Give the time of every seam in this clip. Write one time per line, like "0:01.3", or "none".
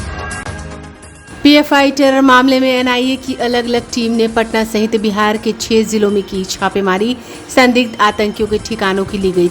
0:01.1